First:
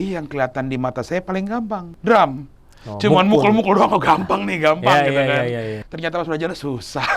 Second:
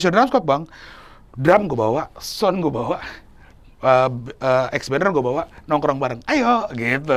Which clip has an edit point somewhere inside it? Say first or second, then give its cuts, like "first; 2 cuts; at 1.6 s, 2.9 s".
first; 2 cuts; at 1.9 s, 5.8 s